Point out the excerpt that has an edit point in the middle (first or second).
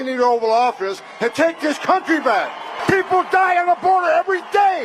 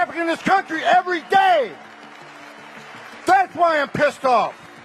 first